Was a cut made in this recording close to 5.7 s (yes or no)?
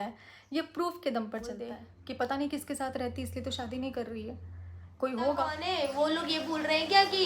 yes